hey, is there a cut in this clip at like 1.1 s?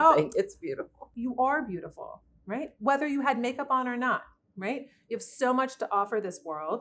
yes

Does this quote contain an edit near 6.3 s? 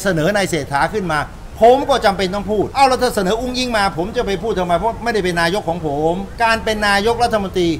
yes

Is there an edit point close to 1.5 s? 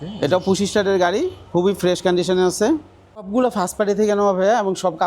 no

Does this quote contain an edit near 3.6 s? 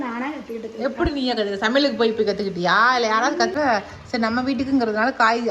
yes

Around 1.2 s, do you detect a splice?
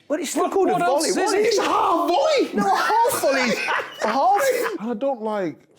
no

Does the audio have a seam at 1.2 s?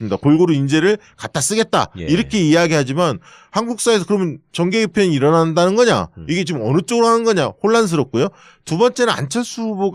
no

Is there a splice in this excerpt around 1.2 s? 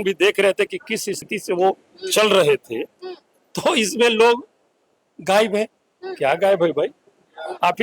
yes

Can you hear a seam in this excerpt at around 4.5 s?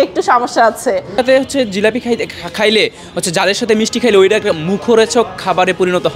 no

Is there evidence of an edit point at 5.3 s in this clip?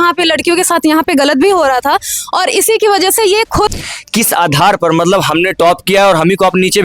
no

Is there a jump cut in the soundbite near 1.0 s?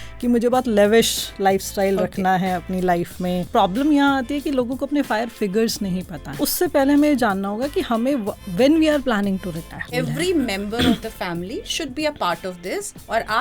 no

